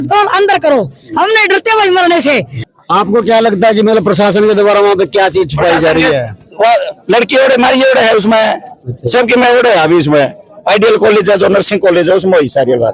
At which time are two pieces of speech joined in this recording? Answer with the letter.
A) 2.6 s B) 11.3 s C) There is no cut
A